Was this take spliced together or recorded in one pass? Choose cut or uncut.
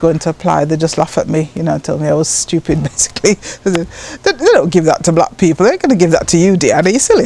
uncut